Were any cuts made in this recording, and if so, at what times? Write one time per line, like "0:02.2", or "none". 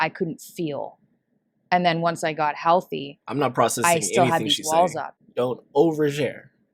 0:05.2